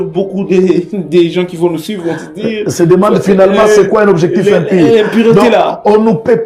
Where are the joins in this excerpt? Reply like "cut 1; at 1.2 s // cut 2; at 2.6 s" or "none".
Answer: none